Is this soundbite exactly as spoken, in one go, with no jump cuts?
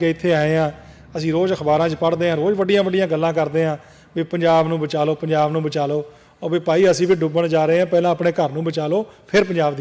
yes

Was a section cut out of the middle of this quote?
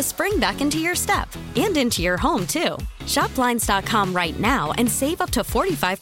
no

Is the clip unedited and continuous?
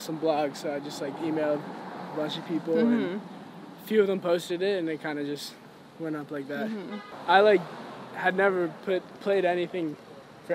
no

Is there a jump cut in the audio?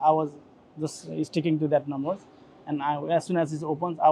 no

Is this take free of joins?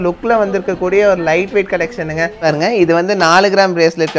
no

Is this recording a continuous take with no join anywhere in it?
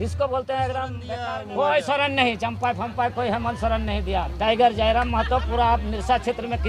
no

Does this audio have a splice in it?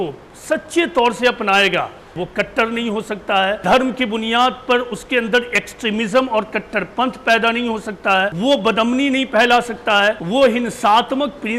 yes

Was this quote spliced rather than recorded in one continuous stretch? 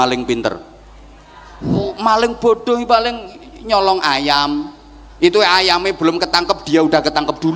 no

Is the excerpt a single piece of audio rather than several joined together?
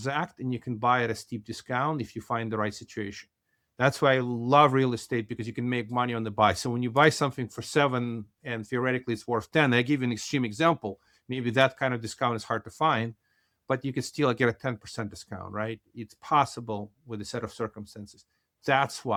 yes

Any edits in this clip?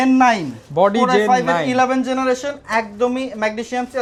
no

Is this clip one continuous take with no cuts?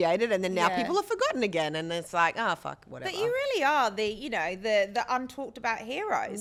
yes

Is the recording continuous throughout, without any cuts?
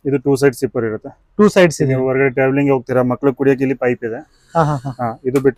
yes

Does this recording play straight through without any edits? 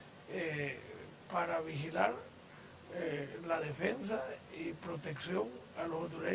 yes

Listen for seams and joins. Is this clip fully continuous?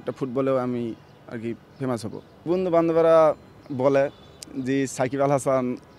no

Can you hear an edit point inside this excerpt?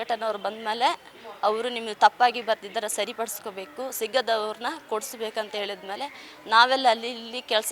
no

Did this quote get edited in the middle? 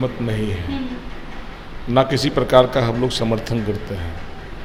no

